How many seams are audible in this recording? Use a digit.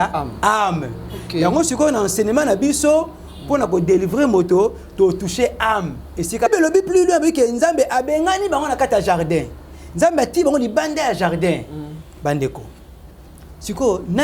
1